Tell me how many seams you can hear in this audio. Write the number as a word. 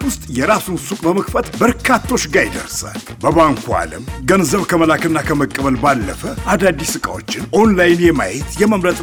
zero